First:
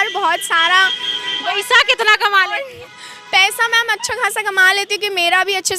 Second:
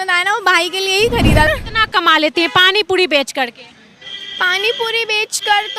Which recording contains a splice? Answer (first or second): second